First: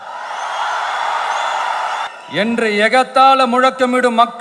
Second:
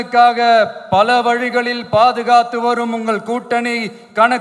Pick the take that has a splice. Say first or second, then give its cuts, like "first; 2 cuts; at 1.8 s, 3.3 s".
first; 1 cut; at 2.1 s